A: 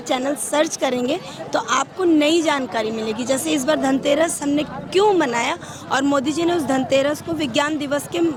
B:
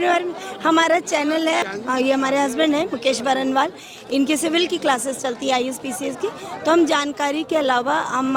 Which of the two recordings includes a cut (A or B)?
B